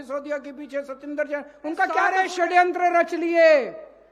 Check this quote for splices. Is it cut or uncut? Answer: cut